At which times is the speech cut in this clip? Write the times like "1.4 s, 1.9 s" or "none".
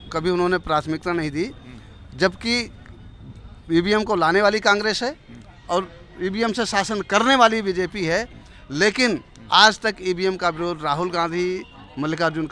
none